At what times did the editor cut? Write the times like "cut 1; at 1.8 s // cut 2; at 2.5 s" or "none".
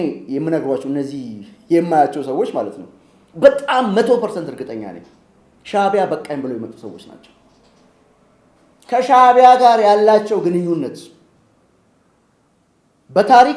none